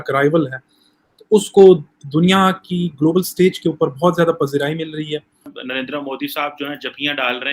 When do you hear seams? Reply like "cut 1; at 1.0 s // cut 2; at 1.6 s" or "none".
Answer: cut 1; at 5.5 s